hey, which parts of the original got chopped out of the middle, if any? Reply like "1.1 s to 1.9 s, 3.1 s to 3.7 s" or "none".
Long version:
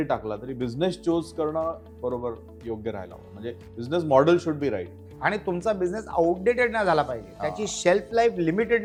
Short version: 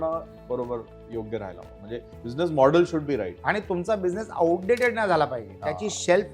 4.9 s to 5.1 s

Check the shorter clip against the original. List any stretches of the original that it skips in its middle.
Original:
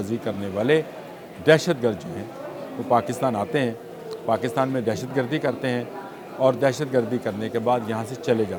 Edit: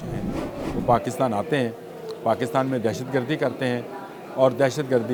none

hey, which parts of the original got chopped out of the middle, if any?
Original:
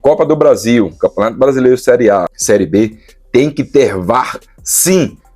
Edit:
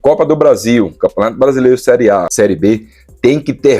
2.3 s to 2.4 s

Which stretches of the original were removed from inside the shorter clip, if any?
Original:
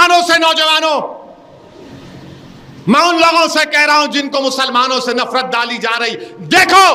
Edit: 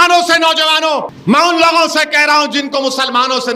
1.1 s to 2.7 s

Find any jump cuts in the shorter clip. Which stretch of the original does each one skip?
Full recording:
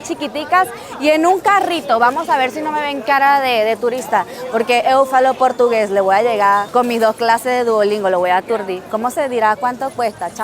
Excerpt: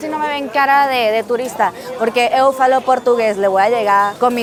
none

